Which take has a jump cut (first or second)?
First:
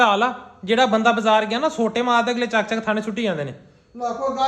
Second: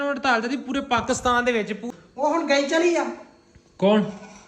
second